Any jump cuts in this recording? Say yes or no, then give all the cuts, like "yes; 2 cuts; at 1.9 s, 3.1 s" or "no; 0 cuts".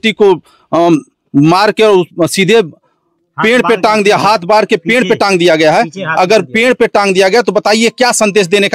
no; 0 cuts